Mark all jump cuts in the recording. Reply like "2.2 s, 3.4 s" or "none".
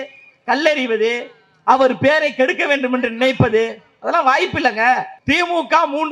5.1 s

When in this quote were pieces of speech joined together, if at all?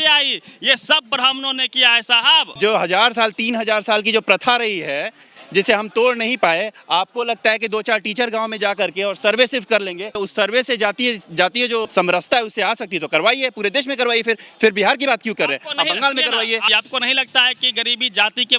2.5 s, 10.1 s, 11.9 s, 16.6 s

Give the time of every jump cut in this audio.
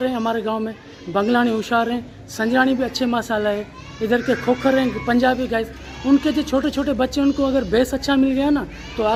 none

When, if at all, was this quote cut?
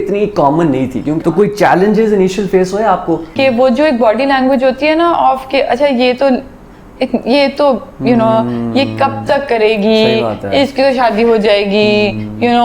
1.2 s, 3.3 s

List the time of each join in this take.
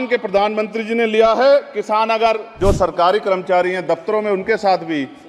2.5 s

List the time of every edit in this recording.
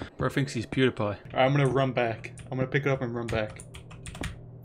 1.2 s

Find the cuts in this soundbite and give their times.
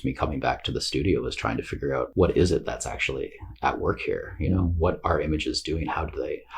2.1 s

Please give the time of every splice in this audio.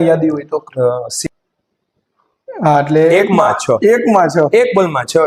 1.2 s

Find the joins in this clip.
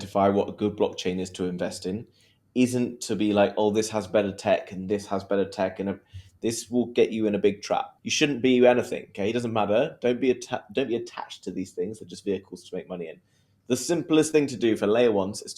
8.0 s

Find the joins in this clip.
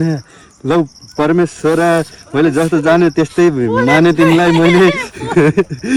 none

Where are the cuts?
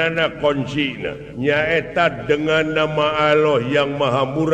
1.2 s

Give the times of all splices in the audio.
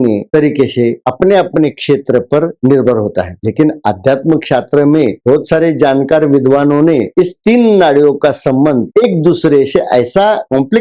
none

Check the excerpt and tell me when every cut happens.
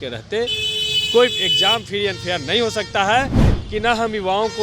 3.5 s

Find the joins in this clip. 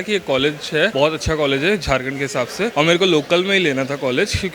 0.9 s, 2.7 s

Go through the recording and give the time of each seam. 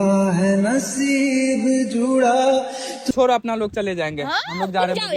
3.1 s

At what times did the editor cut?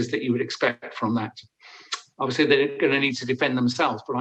none

